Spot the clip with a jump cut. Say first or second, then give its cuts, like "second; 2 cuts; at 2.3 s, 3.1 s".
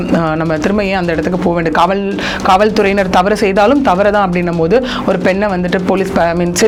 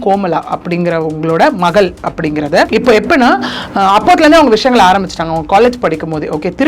second; 1 cut; at 2.7 s